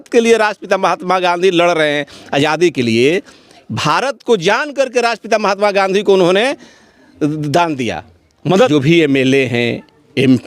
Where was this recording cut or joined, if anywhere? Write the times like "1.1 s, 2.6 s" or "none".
8.7 s